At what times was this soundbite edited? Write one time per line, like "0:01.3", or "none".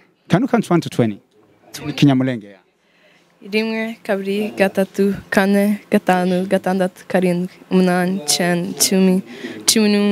none